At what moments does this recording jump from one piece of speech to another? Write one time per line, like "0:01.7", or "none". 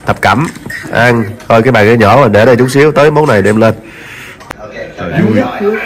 0:04.6

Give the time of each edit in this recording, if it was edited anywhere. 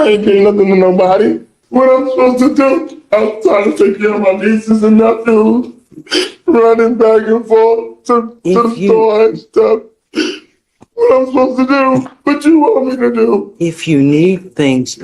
0:01.5

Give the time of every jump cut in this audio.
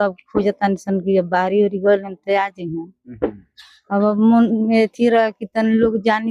none

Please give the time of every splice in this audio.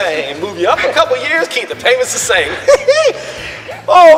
none

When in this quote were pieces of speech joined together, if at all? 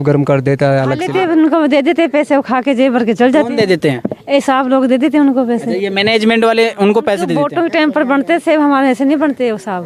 0:01.0
0:07.3

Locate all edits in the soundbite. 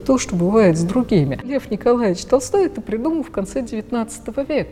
0:01.5

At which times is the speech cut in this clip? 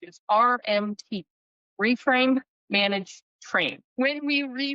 0:03.8

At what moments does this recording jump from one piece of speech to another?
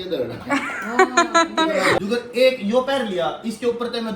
0:02.0

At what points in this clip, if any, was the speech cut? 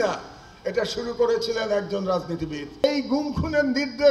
0:02.8

